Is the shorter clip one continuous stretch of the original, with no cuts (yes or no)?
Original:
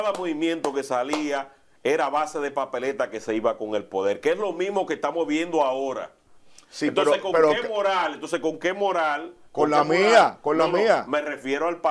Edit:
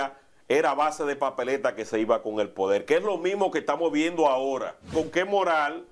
no